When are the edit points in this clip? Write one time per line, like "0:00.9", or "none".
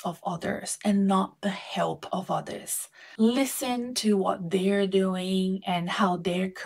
none